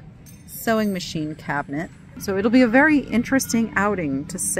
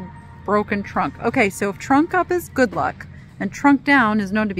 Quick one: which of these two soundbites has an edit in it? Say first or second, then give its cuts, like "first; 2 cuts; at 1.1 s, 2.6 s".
first; 1 cut; at 2.2 s